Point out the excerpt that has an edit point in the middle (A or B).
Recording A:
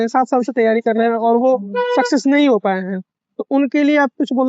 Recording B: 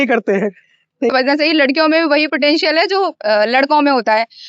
B